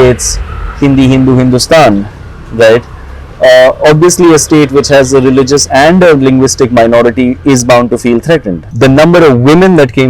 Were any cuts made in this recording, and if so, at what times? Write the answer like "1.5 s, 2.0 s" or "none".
8.6 s